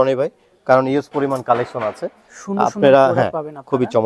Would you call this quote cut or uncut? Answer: uncut